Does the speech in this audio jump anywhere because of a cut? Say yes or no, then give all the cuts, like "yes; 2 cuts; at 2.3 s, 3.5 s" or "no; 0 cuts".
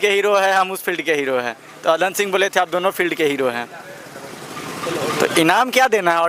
no; 0 cuts